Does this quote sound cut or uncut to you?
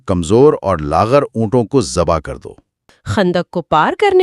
cut